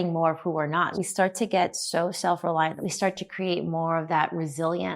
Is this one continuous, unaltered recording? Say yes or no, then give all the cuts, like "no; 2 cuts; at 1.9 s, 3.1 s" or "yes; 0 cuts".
no; 2 cuts; at 1.0 s, 2.8 s